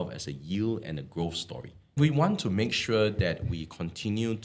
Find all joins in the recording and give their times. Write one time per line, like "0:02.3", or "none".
0:02.0